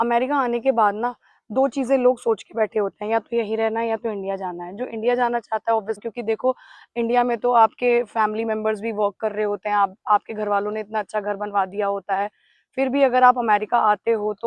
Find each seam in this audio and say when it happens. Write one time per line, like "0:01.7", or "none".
0:06.1